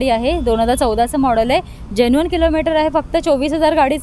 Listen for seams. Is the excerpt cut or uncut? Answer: uncut